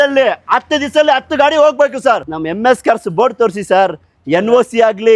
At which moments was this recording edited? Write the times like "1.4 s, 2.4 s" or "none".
2.3 s